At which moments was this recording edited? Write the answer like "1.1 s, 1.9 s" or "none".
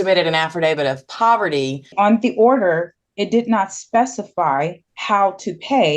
1.9 s, 4.9 s